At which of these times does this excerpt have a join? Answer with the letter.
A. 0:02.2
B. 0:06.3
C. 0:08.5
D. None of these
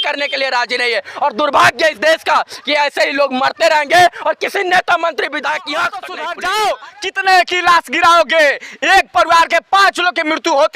B